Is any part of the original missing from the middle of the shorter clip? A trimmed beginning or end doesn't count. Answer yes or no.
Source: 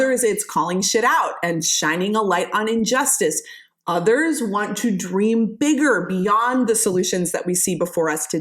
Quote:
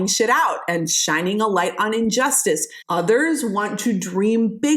yes